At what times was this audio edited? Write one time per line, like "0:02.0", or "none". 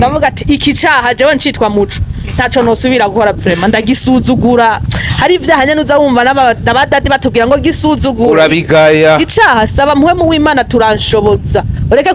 none

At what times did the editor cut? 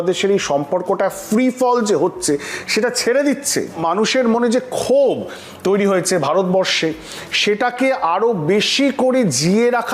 0:03.8

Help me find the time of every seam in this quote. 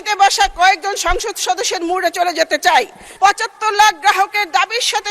0:03.0

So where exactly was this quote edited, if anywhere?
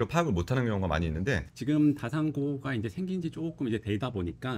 0:01.5

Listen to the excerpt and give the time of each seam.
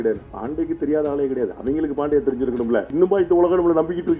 0:02.9

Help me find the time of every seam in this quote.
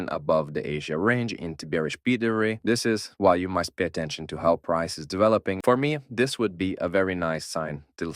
0:02.6
0:05.6

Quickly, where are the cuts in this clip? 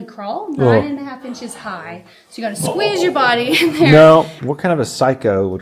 0:04.4

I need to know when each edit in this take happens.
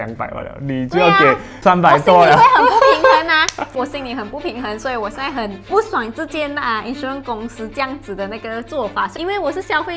0:01.6
0:03.7
0:05.7
0:09.1

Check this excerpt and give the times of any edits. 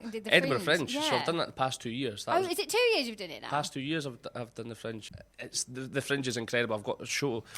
0:05.2

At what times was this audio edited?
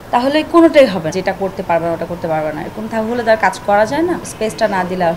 0:01.1
0:04.3

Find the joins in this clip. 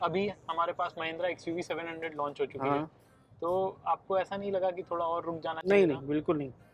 none

